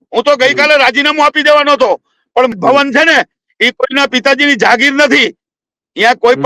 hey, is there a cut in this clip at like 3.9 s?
no; 1 cut; at 2.5 s

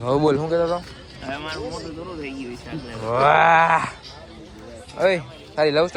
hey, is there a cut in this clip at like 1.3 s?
no; 0 cuts

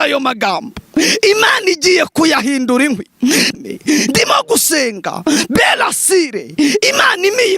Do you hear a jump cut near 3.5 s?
yes; 1 cut; at 3.5 s

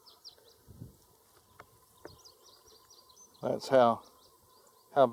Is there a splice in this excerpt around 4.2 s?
no; 1 cut; at 1.4 s

